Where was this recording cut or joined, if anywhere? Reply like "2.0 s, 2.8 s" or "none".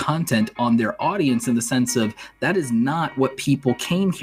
none